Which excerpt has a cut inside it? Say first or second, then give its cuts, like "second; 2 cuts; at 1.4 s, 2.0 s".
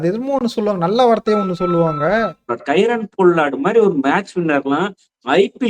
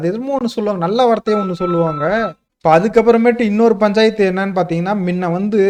first; 1 cut; at 2.5 s